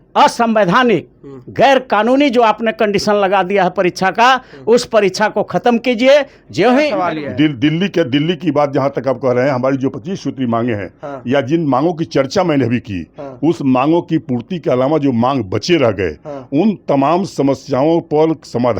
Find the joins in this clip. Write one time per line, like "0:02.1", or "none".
0:07.0